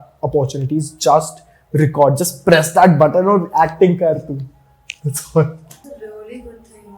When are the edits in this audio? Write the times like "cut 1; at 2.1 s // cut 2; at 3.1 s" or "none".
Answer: cut 1; at 5.7 s